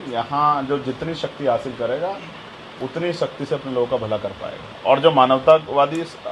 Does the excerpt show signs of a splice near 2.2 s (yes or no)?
no